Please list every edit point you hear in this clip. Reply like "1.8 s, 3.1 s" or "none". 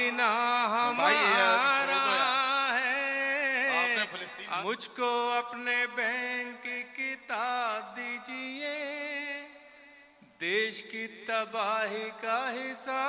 4.6 s